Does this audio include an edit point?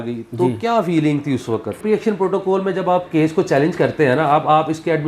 yes; 1 cut; at 1.8 s

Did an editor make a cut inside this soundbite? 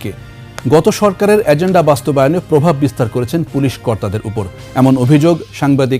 yes; 1 cut; at 4.5 s

